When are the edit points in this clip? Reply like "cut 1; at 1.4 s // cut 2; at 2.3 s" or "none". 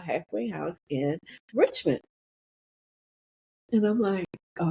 none